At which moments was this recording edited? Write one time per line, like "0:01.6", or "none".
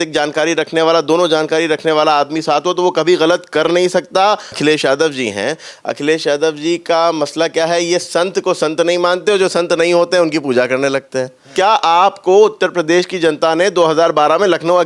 0:04.6
0:11.4